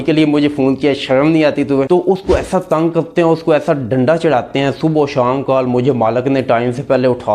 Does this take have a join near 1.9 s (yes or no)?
yes